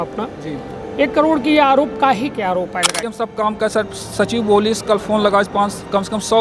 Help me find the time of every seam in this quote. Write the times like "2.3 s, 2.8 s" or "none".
3.0 s